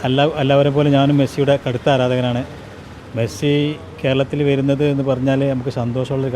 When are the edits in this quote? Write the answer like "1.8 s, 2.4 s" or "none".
none

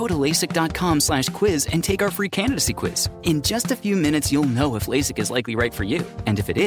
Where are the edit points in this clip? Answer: none

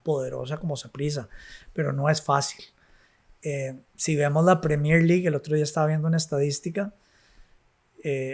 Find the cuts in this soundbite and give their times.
none

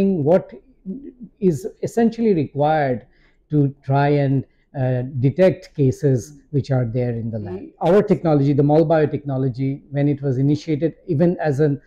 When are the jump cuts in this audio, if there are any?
7.7 s

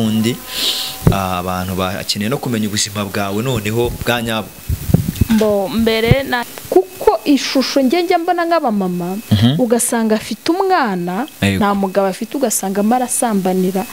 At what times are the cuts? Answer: 6.5 s

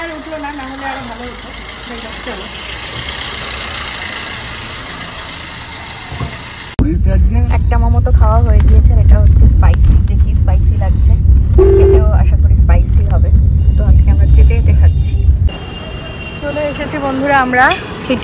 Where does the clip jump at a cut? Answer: none

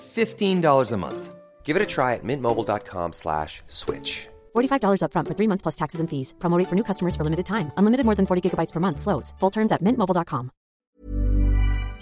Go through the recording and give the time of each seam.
10.8 s

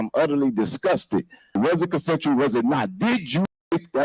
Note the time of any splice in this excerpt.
1.6 s

